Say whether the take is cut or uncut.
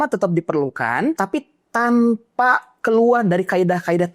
cut